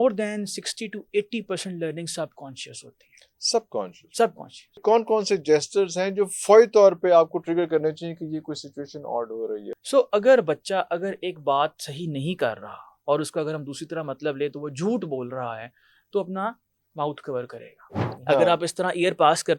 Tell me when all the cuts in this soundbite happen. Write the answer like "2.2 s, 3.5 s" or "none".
4.8 s, 9.7 s, 18.2 s